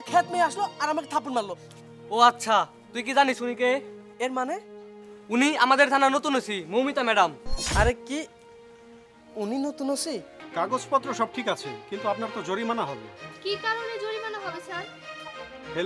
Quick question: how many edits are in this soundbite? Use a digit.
2